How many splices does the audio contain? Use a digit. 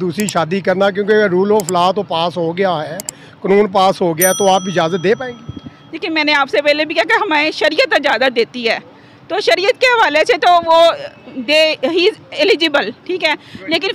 0